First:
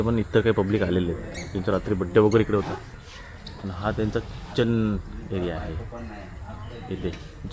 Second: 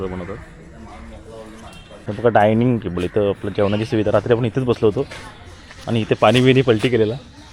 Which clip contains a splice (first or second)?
second